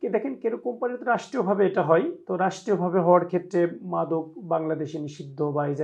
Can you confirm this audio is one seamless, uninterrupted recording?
yes; 0 cuts

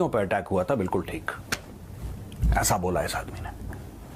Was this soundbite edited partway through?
no; 0 cuts

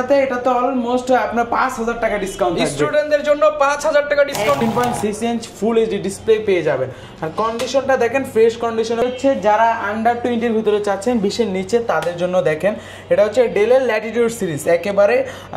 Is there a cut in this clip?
yes; 2 cuts; at 4.6 s, 9.0 s

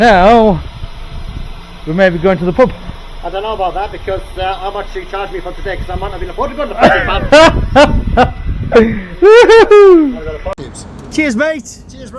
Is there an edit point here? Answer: no; 0 cuts

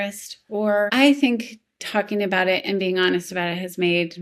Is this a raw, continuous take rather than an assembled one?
no; 1 cut; at 0.9 s

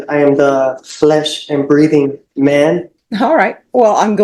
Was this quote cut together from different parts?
yes; 1 cut; at 3.0 s

